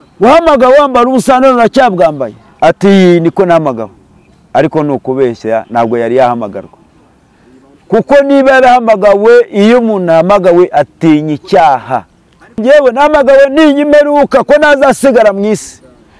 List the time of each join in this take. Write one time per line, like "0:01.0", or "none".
0:12.6